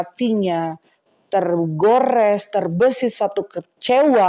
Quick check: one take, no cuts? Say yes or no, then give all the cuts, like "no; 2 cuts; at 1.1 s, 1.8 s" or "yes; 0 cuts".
yes; 0 cuts